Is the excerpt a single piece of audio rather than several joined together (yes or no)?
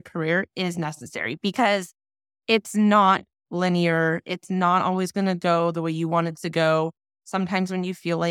yes